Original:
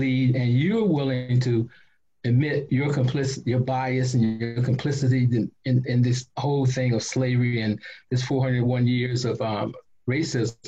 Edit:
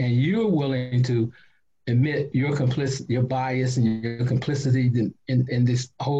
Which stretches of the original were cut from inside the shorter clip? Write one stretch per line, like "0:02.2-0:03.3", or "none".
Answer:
none